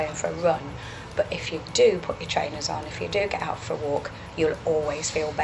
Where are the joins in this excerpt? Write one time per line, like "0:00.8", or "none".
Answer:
none